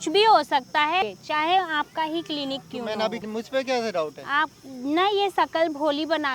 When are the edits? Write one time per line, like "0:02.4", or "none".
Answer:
0:01.0
0:03.2